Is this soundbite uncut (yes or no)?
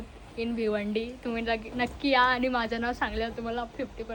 yes